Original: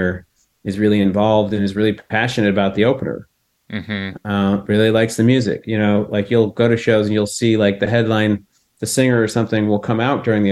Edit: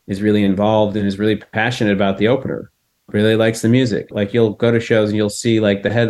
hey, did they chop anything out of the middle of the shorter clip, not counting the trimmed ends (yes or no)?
yes